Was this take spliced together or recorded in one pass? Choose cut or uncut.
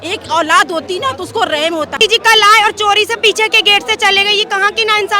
cut